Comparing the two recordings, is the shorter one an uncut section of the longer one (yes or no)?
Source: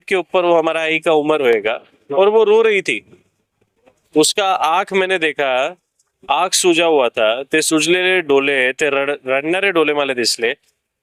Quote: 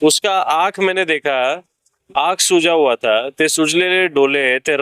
yes